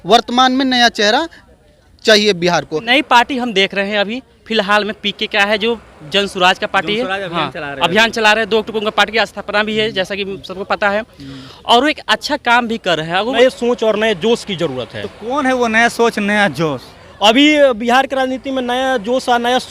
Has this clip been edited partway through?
yes; 2 cuts; at 2.9 s, 13.4 s

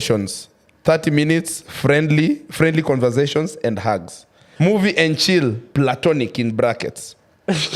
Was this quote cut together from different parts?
yes; 1 cut; at 4.4 s

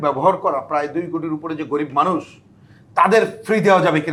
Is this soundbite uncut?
yes; 0 cuts

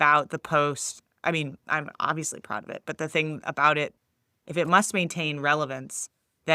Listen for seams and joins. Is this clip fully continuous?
no; 2 cuts; at 0.9 s, 3.9 s

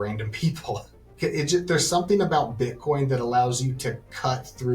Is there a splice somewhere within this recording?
yes; 1 cut; at 1.0 s

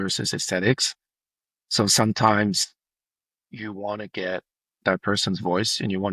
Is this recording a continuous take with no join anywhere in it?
yes; 0 cuts

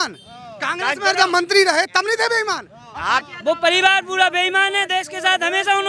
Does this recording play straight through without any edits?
no; 1 cut; at 3.2 s

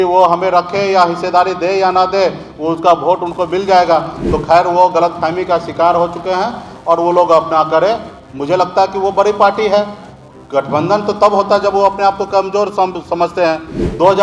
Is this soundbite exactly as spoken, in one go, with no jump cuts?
yes; 0 cuts

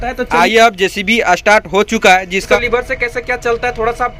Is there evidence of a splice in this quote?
yes; 1 cut; at 2.5 s

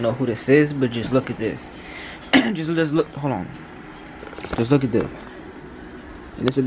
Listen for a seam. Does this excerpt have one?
no; 0 cuts

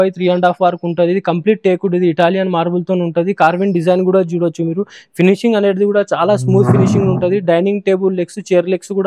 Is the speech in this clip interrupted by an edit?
no; 0 cuts

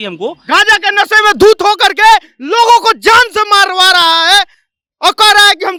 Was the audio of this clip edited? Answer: no; 0 cuts

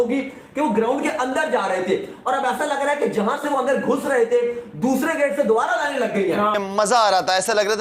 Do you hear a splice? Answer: yes; 1 cut; at 6.5 s

